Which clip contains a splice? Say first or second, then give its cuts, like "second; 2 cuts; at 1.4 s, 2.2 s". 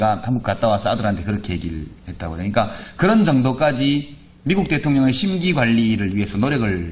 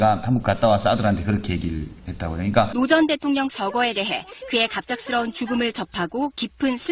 second; 1 cut; at 2.7 s